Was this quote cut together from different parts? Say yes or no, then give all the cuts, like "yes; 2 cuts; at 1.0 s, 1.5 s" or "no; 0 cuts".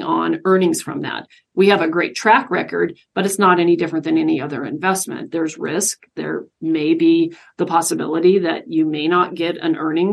no; 0 cuts